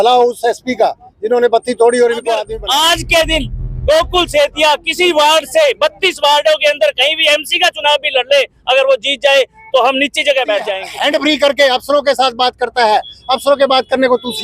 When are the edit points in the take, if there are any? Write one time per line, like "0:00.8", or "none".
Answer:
0:02.5
0:10.9